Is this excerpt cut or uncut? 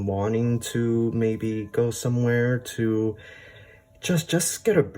uncut